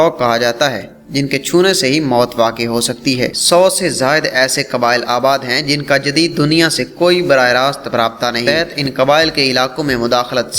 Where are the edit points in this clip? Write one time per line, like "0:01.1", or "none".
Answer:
0:03.4
0:08.5